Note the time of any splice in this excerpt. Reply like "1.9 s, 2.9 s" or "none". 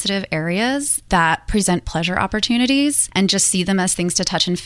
1.0 s, 3.0 s